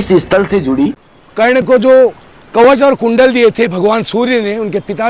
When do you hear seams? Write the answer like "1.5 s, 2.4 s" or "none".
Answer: 1.1 s